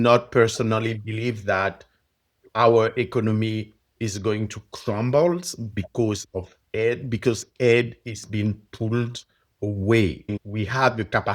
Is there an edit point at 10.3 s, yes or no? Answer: yes